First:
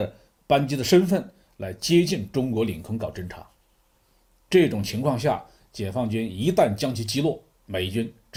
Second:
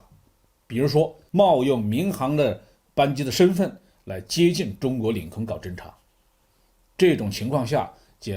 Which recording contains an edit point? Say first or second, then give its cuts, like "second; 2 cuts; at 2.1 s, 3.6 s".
second; 1 cut; at 1.2 s